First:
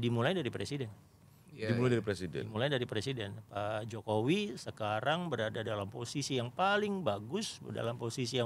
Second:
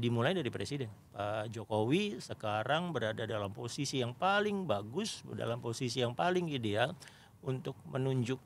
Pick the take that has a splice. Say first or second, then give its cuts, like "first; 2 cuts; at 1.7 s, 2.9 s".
second; 1 cut; at 1.0 s